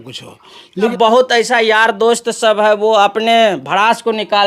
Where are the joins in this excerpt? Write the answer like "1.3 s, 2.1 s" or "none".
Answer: 0.9 s